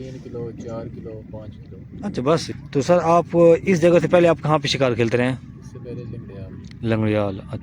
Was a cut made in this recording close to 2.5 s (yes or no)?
yes